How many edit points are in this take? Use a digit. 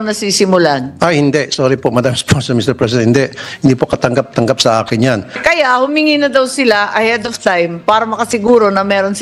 1